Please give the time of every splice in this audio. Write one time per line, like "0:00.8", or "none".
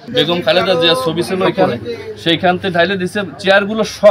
none